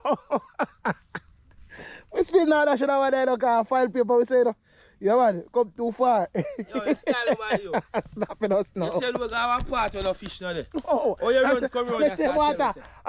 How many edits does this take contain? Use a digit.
0